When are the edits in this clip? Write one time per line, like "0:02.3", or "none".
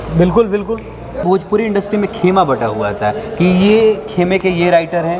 0:01.2